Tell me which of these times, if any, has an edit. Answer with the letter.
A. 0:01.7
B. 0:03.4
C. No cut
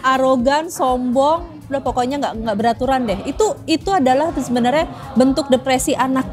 C